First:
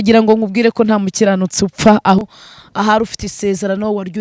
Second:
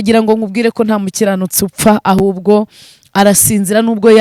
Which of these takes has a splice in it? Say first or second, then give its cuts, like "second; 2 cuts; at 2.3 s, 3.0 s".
first; 1 cut; at 2.2 s